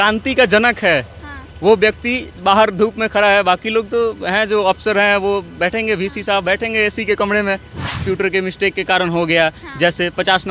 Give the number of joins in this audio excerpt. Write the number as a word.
one